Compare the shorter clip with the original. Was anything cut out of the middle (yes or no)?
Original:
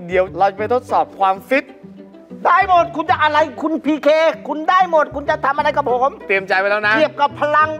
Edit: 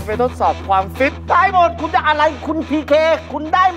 yes